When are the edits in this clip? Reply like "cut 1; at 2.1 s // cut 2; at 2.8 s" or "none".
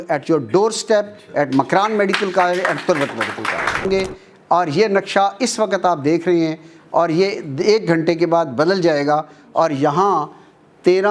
cut 1; at 3.9 s